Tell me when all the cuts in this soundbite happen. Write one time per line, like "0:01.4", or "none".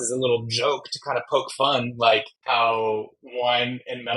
0:02.3

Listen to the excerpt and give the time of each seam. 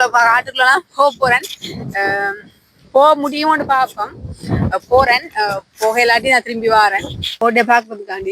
0:07.3

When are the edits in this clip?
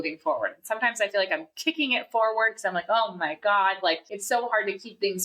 0:04.1

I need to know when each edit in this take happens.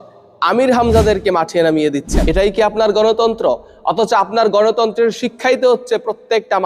0:02.1

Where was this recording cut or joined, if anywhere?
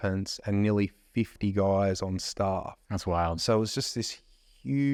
none

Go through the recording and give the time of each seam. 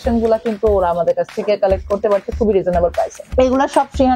0:03.2

